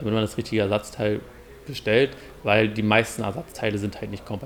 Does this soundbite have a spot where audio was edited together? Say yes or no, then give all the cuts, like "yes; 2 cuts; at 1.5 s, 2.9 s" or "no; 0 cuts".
no; 0 cuts